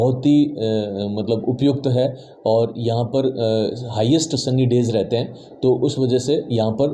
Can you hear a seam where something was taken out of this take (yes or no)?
no